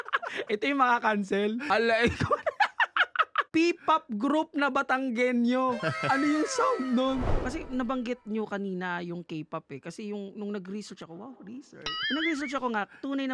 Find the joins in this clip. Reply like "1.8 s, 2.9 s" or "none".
1.6 s, 3.5 s, 7.3 s